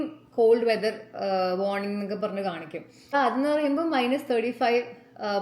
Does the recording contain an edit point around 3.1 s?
yes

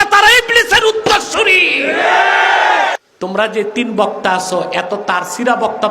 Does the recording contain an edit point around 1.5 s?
no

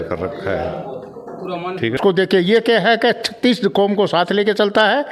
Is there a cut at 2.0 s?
yes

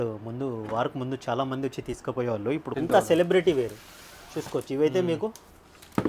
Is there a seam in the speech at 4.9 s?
no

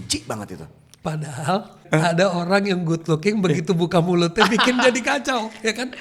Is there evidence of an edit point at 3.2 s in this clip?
no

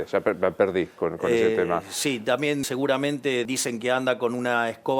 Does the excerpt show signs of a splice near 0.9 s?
no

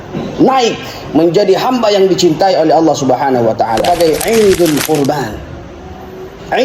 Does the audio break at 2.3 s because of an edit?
no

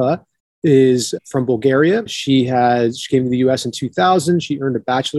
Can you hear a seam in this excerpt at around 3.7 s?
no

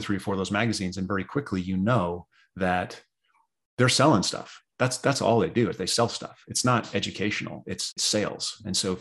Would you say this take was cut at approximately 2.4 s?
no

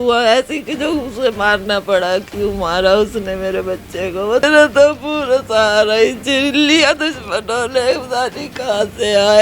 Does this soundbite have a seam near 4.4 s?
yes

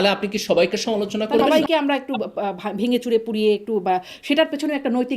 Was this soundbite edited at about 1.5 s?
yes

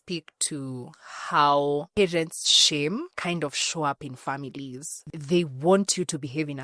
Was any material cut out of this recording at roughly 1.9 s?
no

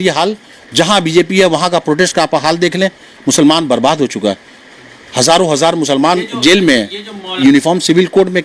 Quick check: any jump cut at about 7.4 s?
yes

